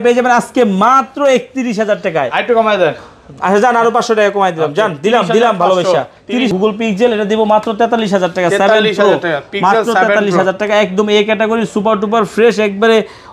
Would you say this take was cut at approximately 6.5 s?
yes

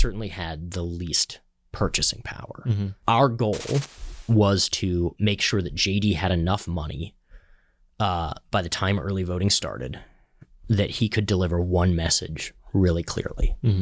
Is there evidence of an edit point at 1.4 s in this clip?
no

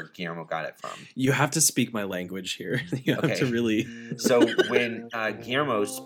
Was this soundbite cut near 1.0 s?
no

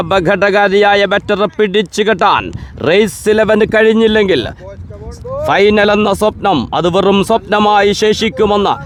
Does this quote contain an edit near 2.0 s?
no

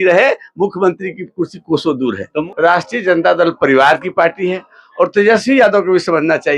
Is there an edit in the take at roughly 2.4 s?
yes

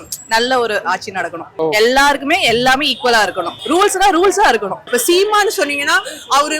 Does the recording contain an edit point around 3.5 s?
yes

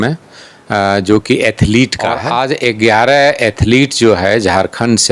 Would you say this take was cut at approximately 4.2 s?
no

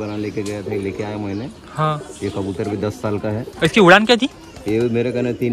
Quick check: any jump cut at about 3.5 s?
yes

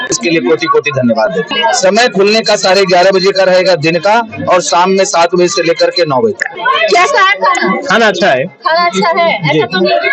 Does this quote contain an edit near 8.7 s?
no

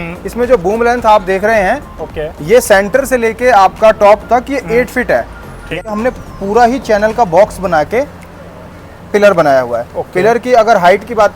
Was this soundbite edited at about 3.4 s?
no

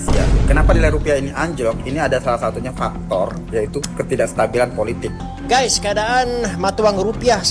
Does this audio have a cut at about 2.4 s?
no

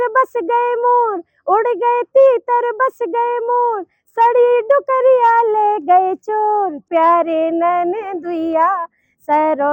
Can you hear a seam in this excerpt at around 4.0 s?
no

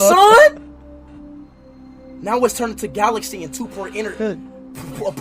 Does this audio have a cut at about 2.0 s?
no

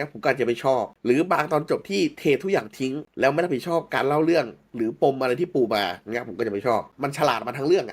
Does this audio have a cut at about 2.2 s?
no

